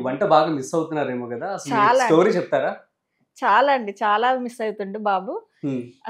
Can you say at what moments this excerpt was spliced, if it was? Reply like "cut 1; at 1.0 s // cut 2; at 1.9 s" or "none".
none